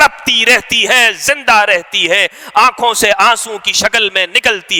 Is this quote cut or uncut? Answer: uncut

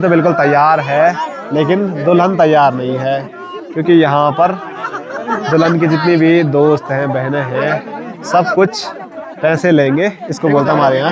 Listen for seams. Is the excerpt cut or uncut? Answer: uncut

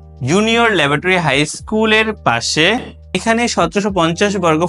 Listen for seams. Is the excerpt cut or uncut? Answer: cut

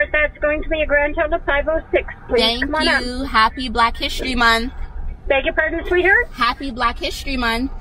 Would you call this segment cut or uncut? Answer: uncut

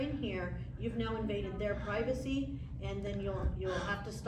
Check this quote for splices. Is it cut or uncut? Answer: uncut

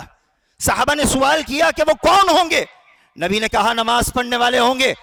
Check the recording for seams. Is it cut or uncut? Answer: uncut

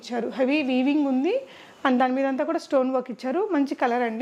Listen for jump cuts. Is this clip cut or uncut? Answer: uncut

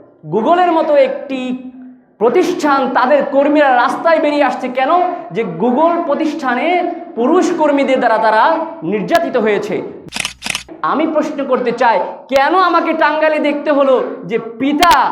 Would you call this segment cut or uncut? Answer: cut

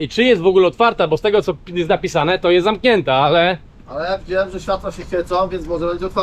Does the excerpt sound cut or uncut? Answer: uncut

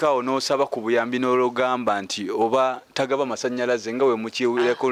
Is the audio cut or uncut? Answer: uncut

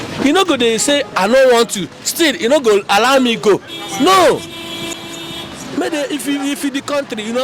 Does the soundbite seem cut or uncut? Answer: uncut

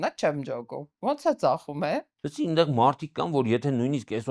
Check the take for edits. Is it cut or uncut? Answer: cut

